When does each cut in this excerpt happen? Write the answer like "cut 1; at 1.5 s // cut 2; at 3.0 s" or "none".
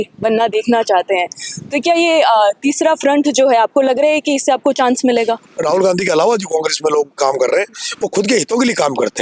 cut 1; at 5.5 s